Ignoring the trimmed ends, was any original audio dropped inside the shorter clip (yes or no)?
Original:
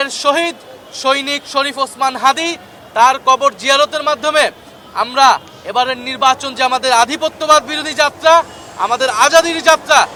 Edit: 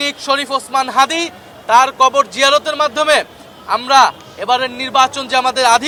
no